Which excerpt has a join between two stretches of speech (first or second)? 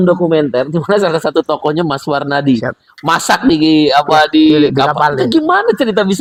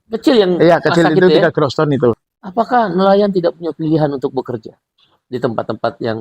second